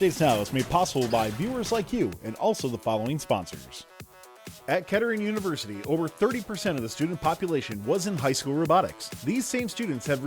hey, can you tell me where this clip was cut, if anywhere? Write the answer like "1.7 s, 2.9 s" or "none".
4.2 s

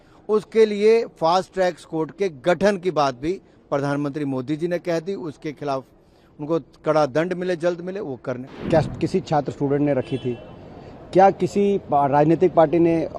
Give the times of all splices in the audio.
8.5 s

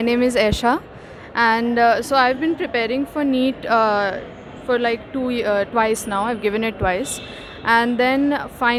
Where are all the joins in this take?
none

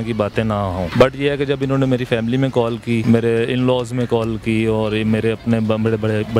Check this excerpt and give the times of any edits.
0.9 s, 3.0 s

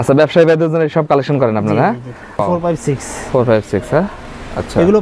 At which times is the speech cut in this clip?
2.4 s

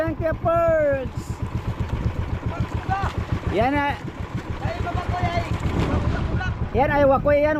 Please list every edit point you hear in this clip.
none

